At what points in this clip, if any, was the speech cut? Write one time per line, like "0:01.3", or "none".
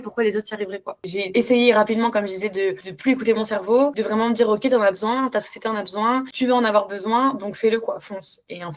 0:01.0